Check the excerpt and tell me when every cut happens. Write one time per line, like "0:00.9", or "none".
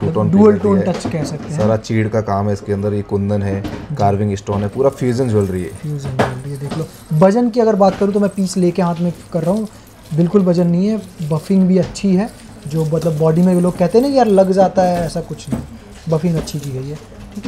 none